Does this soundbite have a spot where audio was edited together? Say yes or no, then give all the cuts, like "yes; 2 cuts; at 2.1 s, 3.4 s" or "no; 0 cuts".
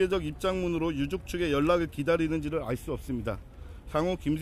no; 0 cuts